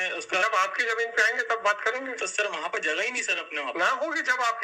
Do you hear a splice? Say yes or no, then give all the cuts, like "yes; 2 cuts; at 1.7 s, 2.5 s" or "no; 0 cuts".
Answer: no; 0 cuts